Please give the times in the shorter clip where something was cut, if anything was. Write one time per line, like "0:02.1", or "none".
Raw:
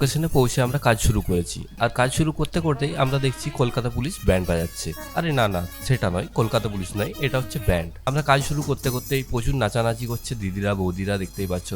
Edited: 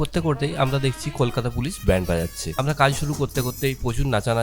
0:02.4